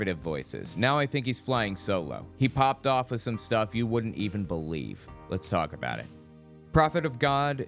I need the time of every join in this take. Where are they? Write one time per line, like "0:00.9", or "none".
0:06.5

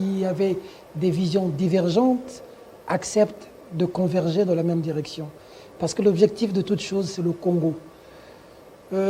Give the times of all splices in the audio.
none

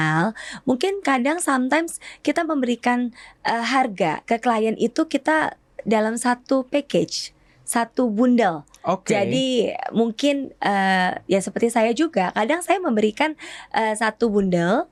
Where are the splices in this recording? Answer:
none

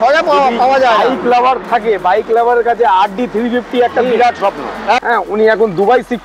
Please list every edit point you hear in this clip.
0:05.0

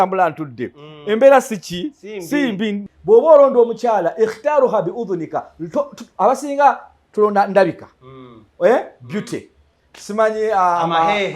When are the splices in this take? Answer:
0:02.9

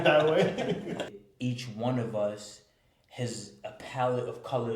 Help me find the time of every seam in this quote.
0:01.1

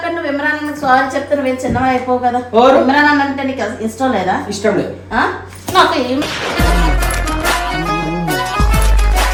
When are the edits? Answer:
none

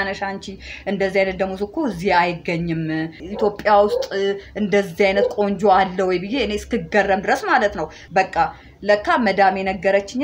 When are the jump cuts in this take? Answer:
0:03.2
0:08.0

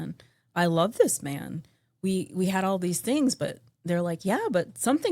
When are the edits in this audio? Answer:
none

